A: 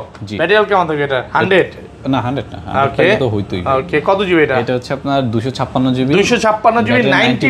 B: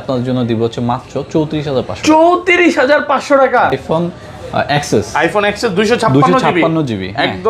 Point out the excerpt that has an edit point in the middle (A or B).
B